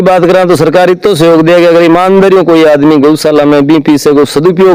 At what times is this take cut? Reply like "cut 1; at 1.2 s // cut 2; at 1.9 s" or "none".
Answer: none